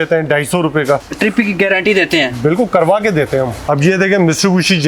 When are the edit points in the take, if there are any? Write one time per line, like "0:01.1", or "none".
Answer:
0:01.0
0:03.6